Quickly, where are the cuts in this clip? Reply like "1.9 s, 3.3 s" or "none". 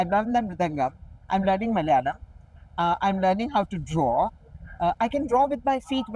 none

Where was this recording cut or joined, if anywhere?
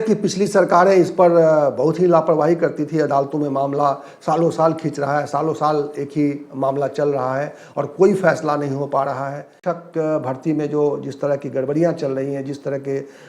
9.5 s

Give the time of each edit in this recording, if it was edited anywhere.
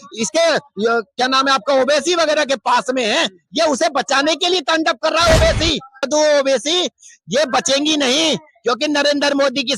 6.0 s

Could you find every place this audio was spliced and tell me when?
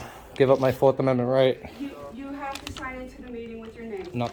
none

